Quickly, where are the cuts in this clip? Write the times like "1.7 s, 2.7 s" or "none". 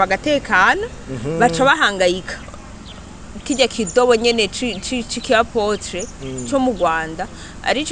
2.5 s